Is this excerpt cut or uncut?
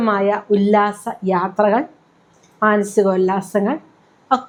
uncut